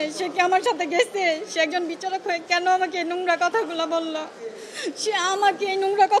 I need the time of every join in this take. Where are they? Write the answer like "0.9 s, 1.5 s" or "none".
none